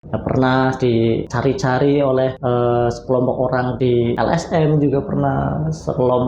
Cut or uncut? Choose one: cut